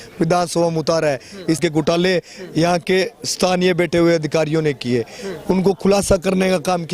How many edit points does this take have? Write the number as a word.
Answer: one